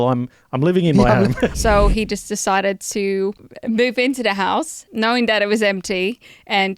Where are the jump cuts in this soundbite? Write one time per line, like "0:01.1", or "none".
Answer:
0:01.6
0:03.5
0:04.8